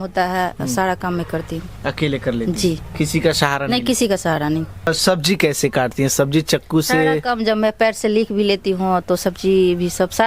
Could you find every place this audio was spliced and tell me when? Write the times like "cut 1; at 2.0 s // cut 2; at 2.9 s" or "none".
cut 1; at 4.9 s